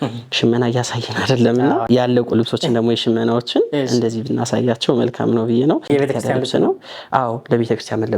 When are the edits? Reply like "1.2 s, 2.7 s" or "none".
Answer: 1.8 s, 5.8 s